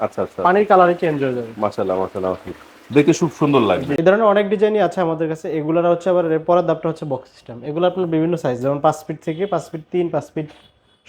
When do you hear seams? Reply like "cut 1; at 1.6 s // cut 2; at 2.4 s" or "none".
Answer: cut 1; at 4.0 s